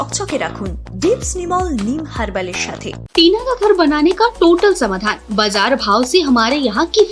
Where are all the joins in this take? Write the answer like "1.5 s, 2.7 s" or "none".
3.0 s

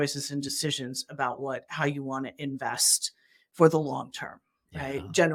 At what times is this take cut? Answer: none

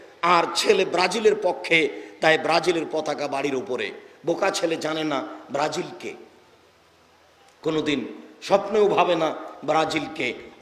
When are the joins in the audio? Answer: none

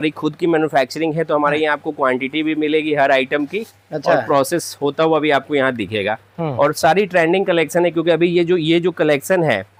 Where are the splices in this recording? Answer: none

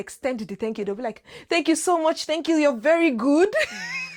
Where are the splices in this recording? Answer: none

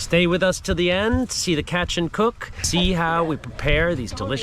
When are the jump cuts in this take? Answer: 2.5 s

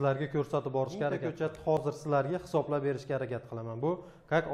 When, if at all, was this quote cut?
1.3 s

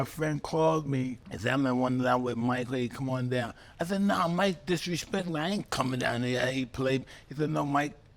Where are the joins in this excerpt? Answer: 1.3 s

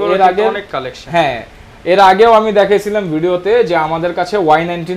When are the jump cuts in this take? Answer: none

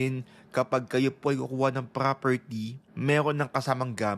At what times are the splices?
2.8 s

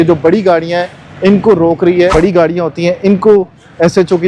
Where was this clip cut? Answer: 2.1 s

